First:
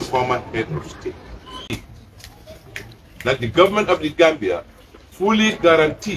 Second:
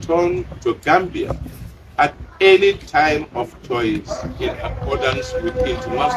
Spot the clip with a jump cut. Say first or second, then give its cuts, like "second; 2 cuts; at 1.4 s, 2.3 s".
first; 1 cut; at 1.6 s